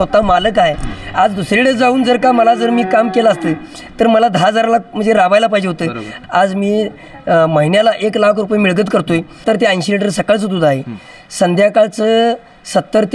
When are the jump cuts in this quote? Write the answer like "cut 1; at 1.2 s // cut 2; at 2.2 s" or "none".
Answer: cut 1; at 6.1 s // cut 2; at 9.4 s